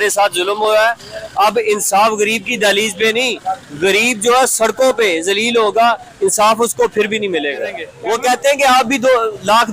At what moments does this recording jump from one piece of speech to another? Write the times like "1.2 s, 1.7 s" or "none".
7.9 s